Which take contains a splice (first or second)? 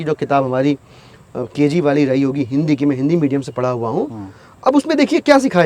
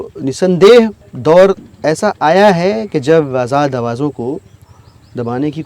second